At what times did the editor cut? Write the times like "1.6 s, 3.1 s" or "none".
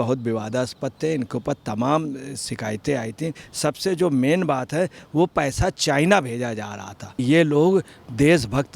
3.4 s, 7.2 s